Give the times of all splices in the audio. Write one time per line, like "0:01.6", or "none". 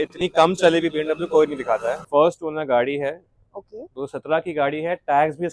0:02.0